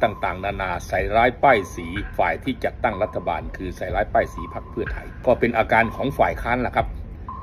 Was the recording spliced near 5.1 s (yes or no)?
yes